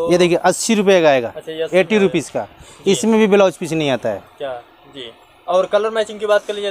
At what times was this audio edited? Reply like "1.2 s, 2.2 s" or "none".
none